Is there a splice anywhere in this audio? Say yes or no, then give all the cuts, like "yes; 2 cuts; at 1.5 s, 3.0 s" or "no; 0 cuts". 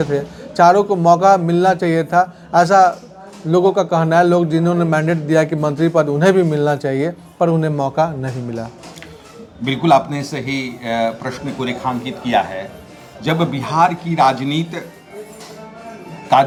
no; 0 cuts